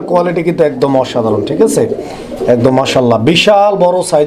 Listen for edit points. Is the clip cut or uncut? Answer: uncut